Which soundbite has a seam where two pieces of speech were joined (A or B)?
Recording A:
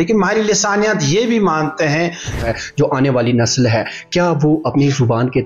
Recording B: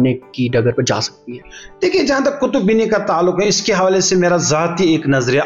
A